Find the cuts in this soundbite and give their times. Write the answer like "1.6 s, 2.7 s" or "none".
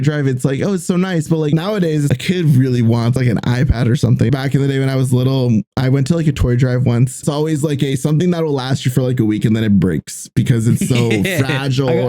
1.5 s, 3.1 s, 4.3 s, 7.2 s